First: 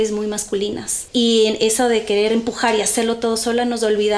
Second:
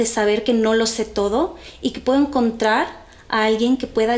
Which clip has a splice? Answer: first; 1 cut; at 0.9 s

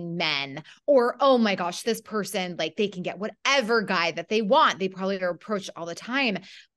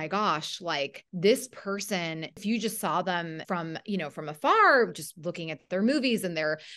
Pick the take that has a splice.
second; 3 cuts; at 1.0 s, 2.4 s, 3.4 s

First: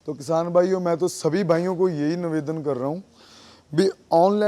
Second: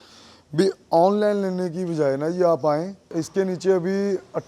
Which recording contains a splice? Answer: second; 1 cut; at 3.0 s

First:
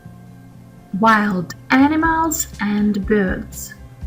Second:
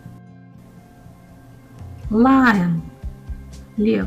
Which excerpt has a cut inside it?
first; 1 cut; at 0.9 s

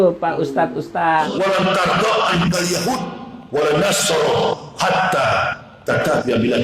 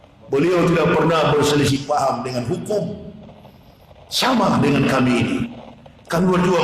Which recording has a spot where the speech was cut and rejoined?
first; 1 cut; at 1.2 s

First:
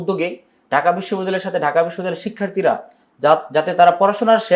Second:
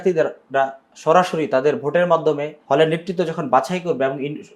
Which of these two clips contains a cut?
second; 1 cut; at 2.5 s

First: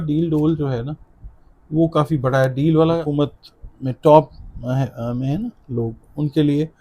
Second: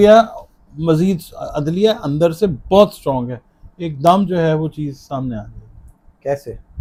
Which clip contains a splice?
first; 1 cut; at 3.1 s

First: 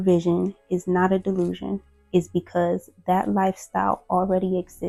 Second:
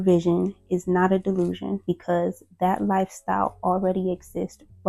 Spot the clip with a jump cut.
second; 1 cut; at 1.8 s

